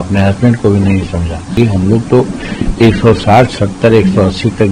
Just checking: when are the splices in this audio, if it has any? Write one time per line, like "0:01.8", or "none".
0:01.5